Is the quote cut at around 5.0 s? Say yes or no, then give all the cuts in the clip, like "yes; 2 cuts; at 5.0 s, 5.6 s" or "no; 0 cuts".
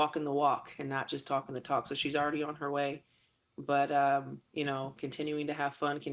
no; 1 cut; at 2.3 s